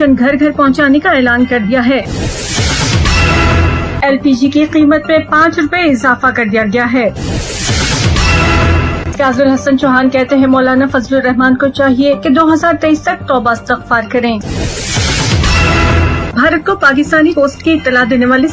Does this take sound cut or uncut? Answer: cut